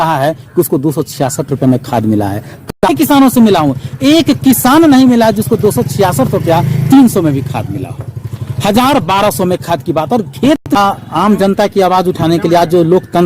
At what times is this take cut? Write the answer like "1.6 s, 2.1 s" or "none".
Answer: 2.8 s, 10.8 s